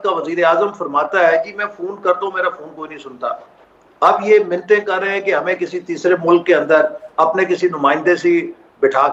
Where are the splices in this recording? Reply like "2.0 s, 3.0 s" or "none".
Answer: none